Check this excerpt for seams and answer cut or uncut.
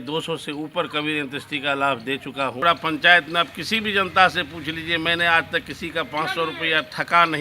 cut